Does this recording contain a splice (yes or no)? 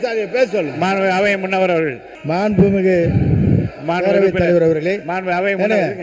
yes